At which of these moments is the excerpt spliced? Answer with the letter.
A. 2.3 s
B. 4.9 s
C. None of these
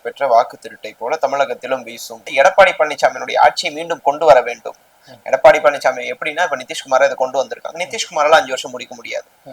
A